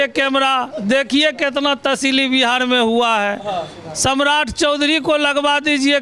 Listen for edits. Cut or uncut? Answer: uncut